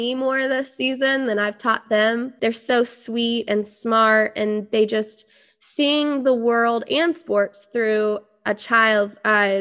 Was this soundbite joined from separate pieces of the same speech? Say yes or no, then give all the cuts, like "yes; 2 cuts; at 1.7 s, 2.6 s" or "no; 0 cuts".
no; 0 cuts